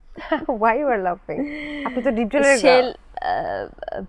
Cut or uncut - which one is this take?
uncut